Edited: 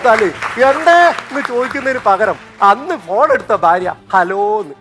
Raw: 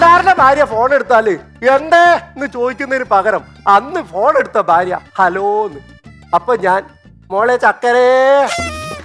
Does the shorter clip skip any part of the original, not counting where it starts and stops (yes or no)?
no